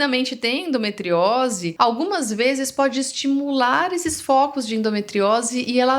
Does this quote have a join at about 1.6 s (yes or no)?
yes